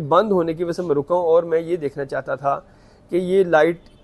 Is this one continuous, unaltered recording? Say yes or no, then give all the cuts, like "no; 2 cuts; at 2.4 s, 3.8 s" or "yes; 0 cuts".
yes; 0 cuts